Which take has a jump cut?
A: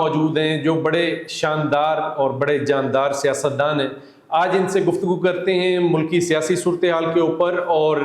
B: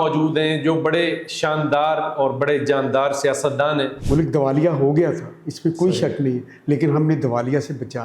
B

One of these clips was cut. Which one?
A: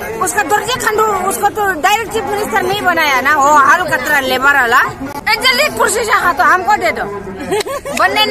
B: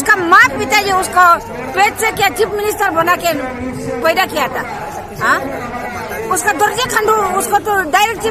A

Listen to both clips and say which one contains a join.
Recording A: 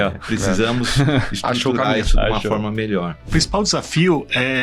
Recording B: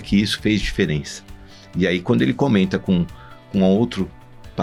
A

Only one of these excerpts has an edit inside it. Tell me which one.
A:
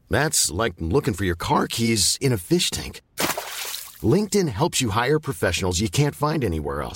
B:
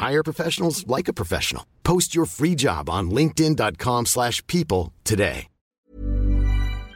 B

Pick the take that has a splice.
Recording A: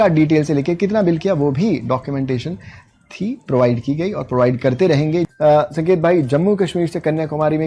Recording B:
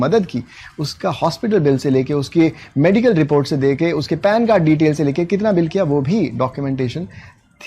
A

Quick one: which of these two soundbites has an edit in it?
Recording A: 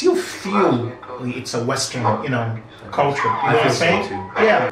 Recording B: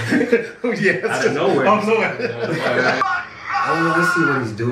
B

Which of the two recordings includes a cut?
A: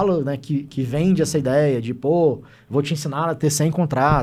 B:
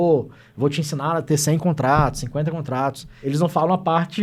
B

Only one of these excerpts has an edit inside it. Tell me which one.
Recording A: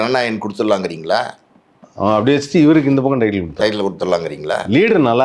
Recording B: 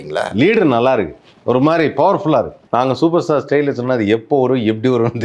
B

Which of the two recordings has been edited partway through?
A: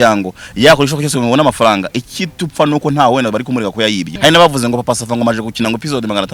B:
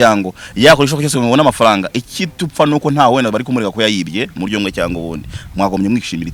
A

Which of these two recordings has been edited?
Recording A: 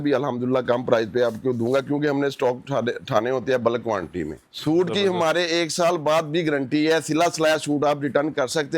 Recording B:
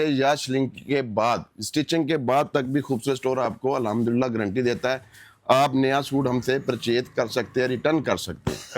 A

